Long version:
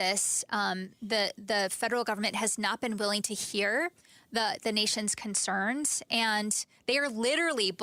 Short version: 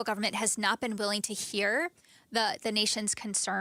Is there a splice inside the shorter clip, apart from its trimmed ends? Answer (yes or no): no